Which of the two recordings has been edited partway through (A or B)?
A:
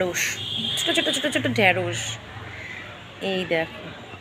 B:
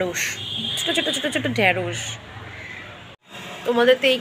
B